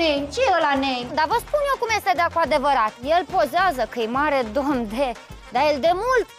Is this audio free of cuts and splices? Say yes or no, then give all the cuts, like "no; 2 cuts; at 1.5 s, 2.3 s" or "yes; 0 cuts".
no; 2 cuts; at 1.1 s, 5.3 s